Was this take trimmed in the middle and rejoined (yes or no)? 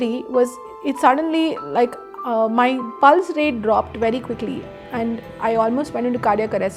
no